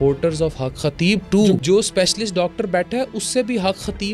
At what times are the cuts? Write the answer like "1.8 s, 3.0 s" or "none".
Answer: 1.6 s